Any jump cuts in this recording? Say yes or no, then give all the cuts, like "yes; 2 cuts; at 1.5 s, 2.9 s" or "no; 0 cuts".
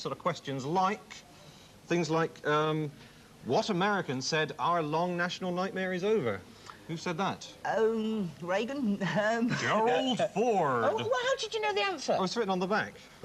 yes; 1 cut; at 1.1 s